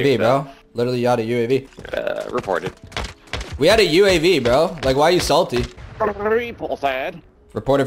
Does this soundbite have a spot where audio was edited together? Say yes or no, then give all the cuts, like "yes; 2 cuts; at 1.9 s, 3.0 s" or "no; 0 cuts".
yes; 2 cuts; at 1.8 s, 5.8 s